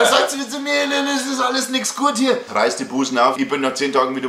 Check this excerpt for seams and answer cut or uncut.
cut